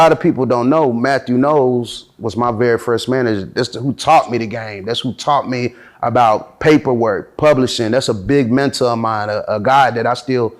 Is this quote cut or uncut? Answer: uncut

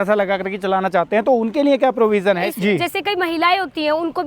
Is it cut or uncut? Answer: cut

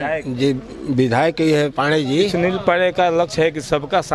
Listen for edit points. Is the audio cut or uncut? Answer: cut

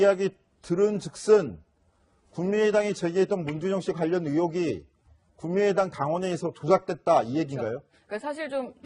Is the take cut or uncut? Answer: cut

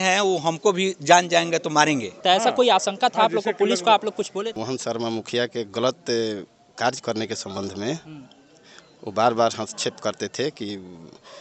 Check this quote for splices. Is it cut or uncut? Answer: cut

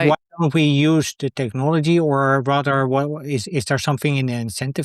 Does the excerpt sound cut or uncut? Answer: uncut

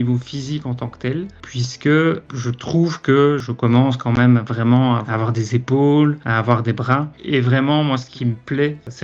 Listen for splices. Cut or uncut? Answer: cut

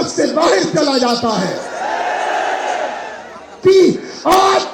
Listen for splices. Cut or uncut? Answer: cut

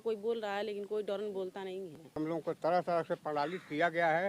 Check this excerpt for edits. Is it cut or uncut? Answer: cut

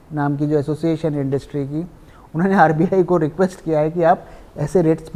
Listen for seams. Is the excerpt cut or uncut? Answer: uncut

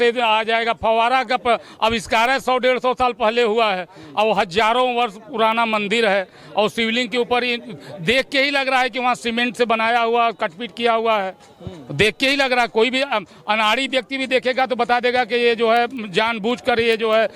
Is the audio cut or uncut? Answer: uncut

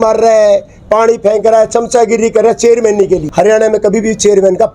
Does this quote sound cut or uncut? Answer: cut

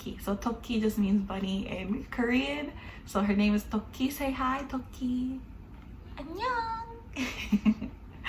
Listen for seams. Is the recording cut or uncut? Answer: uncut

